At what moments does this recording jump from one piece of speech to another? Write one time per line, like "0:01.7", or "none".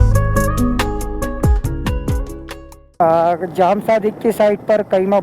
0:03.0